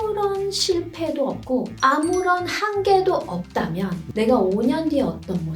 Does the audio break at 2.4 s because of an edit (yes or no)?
no